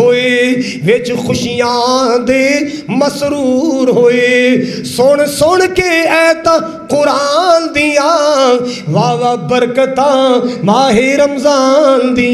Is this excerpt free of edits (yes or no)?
yes